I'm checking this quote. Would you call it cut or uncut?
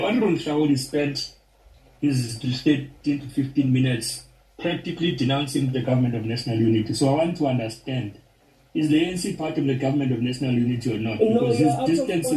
uncut